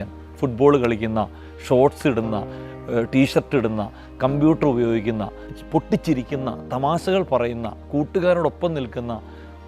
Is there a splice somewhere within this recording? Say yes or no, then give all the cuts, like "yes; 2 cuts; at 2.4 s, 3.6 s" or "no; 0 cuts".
no; 0 cuts